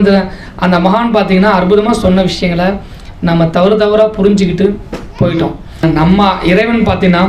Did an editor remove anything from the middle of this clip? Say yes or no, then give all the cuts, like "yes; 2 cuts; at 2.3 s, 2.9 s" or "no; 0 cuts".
yes; 1 cut; at 5.8 s